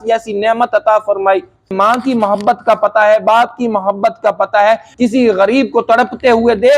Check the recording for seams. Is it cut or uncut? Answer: cut